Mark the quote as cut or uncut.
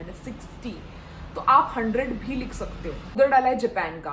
cut